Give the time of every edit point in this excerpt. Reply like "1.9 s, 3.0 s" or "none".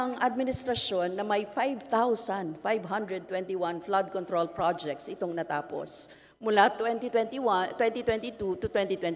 none